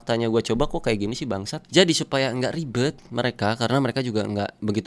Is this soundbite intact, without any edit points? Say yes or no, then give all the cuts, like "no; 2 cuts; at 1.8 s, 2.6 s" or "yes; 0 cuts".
no; 1 cut; at 1.5 s